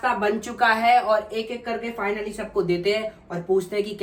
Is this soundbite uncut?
yes; 0 cuts

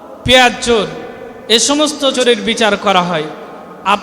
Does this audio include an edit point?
yes; 1 cut; at 2.1 s

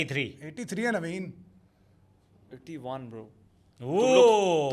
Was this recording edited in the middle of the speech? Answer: no; 0 cuts

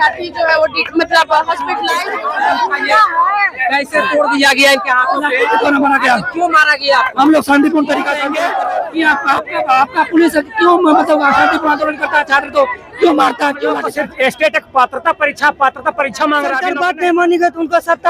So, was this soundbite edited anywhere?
yes; 4 cuts; at 2.0 s, 8.2 s, 13.9 s, 16.7 s

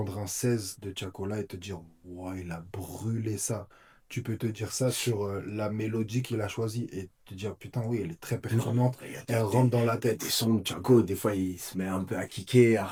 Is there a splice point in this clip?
no; 0 cuts

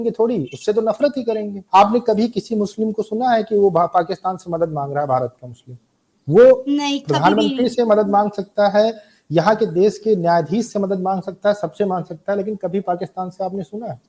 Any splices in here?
yes; 1 cut; at 1.6 s

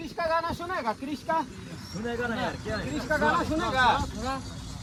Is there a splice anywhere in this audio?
no; 0 cuts

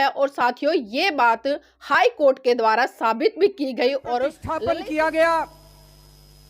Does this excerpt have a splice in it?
yes; 1 cut; at 4.1 s

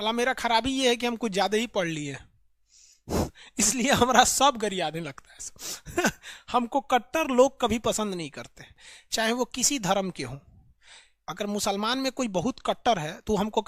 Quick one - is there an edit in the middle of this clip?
no; 0 cuts

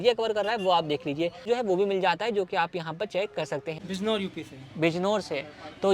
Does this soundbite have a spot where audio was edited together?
yes; 2 cuts; at 1.5 s, 3.7 s

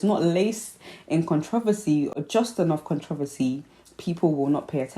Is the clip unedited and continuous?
yes; 0 cuts

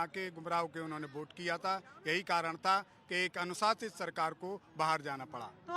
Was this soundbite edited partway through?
no; 0 cuts

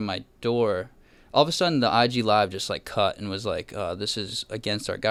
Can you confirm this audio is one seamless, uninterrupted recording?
yes; 0 cuts

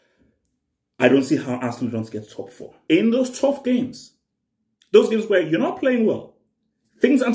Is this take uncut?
no; 1 cut; at 2.6 s

